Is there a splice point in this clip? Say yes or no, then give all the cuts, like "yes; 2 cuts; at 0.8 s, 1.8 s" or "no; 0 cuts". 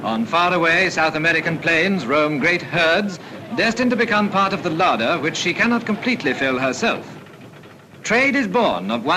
no; 0 cuts